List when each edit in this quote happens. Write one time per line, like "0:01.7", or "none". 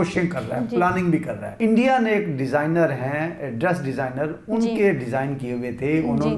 0:01.4